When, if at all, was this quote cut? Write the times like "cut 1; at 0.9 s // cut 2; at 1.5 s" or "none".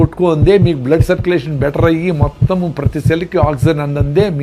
none